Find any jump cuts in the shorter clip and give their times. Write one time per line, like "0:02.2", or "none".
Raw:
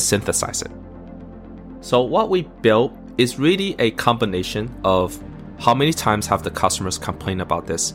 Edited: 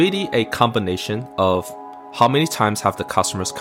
none